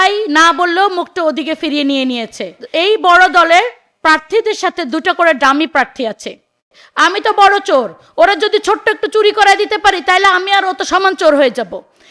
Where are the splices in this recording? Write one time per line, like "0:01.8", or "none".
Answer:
0:02.6
0:06.8